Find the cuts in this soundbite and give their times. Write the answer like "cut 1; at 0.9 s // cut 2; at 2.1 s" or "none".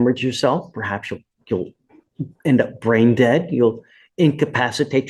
none